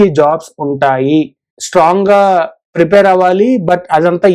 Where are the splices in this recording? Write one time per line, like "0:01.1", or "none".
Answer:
none